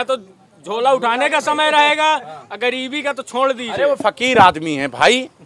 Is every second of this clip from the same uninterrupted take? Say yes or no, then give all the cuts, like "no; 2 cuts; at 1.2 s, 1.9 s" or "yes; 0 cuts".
yes; 0 cuts